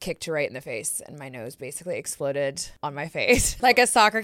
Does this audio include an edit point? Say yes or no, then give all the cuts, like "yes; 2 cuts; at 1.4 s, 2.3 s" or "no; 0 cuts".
yes; 1 cut; at 3.2 s